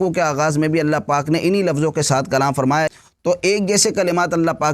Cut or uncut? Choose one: cut